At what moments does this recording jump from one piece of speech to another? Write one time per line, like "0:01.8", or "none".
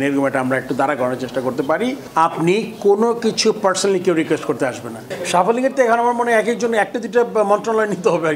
0:02.0
0:05.1